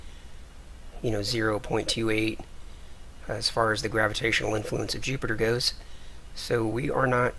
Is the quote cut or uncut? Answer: uncut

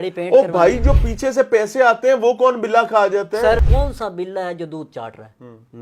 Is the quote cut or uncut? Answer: cut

